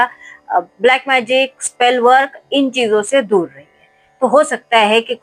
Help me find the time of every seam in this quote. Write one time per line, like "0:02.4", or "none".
none

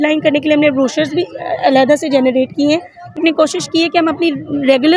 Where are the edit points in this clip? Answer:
0:03.2

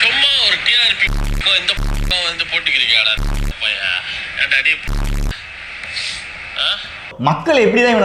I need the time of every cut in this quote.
0:07.1

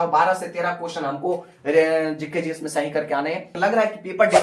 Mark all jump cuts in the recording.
0:03.5

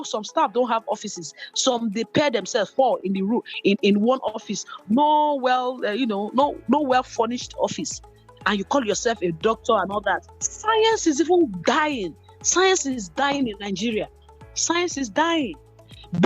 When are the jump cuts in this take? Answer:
0:10.4

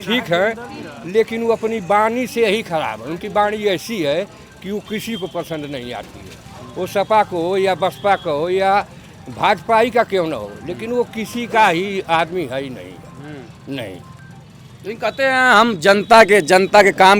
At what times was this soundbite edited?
none

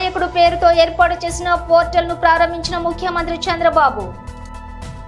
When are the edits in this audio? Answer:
0:04.1

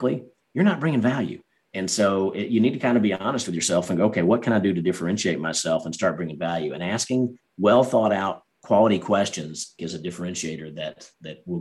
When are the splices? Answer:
0:09.7

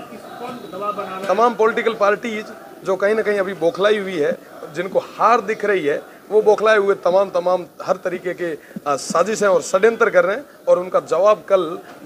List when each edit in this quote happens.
none

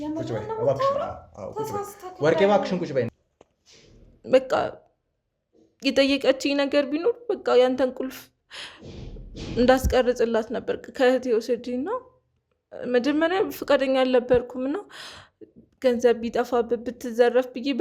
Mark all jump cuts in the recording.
0:03.1

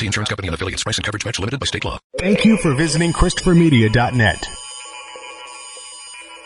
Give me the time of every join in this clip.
0:02.0

